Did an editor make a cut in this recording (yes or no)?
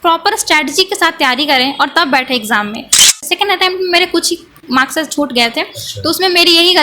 yes